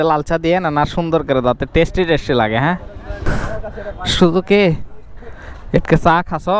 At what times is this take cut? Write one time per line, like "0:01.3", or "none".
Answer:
0:03.2